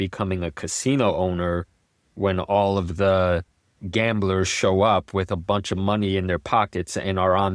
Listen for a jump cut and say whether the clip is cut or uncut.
uncut